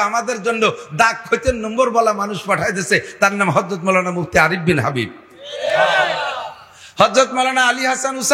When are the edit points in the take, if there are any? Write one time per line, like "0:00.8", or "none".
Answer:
none